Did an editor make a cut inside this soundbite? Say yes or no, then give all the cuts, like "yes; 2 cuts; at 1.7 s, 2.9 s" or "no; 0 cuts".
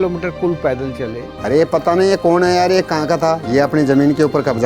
yes; 1 cut; at 1.3 s